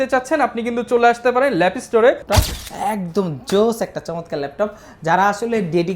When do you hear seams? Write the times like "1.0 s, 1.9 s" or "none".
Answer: 2.2 s